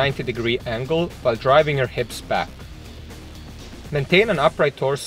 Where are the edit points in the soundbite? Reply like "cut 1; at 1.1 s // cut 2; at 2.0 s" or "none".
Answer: cut 1; at 2.5 s // cut 2; at 3.9 s